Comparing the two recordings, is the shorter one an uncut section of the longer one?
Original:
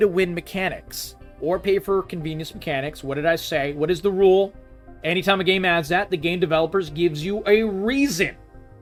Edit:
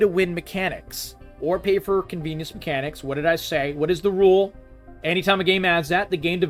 yes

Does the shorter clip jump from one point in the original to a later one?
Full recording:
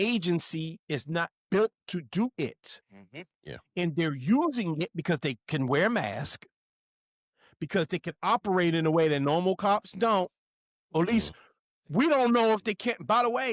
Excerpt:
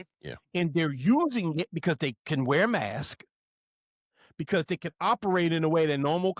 no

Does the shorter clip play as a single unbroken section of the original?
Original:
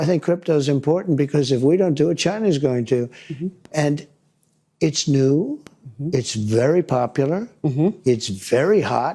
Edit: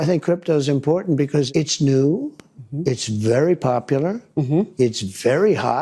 no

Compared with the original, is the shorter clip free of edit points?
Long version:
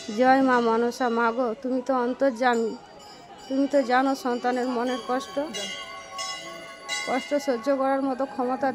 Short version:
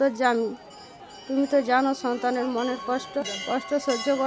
no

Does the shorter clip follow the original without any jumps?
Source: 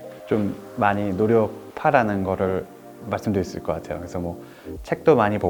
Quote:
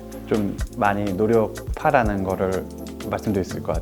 yes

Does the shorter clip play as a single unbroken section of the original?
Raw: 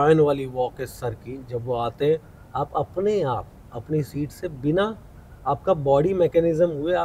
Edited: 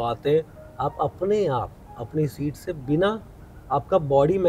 yes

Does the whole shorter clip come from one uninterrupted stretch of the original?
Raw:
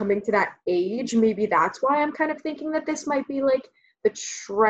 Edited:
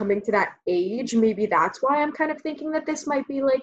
yes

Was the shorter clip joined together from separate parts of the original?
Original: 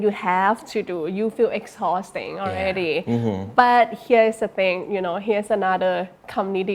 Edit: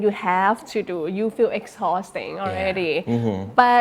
no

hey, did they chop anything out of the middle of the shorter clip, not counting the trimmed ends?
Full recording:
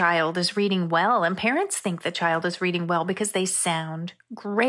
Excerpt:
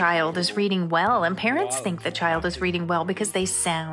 no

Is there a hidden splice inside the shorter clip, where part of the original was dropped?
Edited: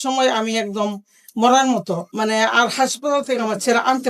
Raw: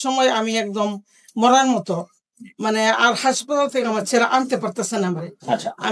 yes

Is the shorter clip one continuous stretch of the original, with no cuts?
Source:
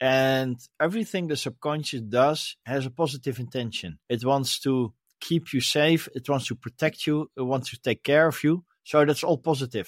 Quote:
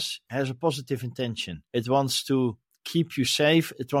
yes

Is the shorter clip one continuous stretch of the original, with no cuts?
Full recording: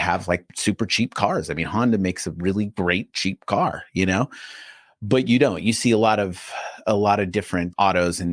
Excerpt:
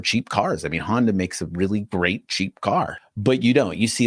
no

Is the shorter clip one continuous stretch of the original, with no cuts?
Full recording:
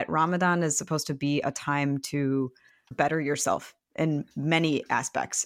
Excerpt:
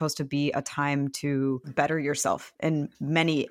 no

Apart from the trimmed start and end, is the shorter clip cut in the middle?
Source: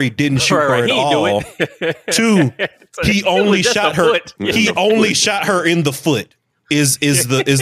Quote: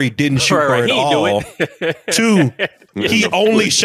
yes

